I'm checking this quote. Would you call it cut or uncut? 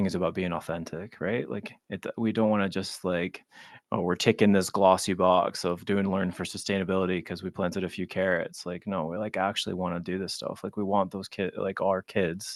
uncut